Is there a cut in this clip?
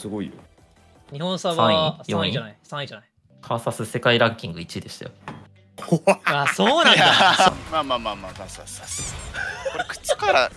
yes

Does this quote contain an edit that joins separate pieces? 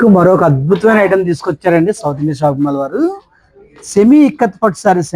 no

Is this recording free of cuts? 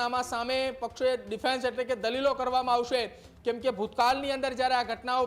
yes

